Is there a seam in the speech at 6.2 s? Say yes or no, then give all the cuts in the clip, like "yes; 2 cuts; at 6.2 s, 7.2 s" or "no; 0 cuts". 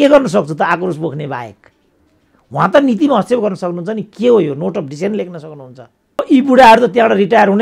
yes; 1 cut; at 6.2 s